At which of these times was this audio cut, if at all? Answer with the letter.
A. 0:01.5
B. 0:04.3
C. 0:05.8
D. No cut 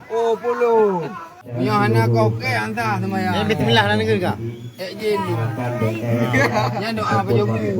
A